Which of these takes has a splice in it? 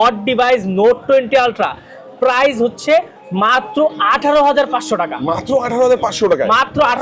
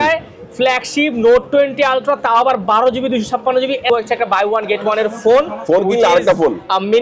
second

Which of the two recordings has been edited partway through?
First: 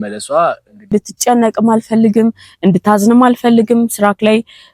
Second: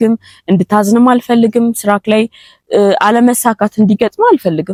first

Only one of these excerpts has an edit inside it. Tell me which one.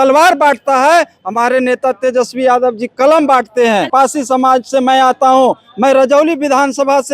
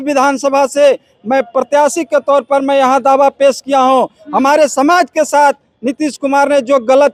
first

